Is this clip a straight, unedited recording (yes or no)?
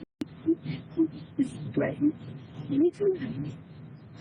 yes